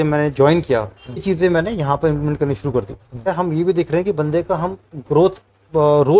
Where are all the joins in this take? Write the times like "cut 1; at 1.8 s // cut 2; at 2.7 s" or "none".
cut 1; at 1.2 s // cut 2; at 3.3 s